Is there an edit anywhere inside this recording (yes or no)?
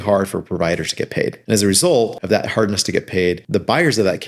yes